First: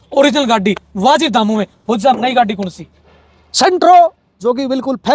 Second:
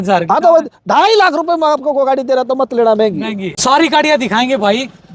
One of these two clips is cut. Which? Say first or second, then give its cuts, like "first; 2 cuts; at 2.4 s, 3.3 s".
second; 1 cut; at 3.5 s